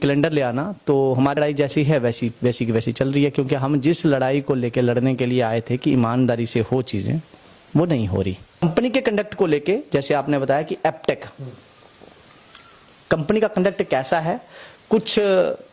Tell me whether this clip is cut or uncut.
cut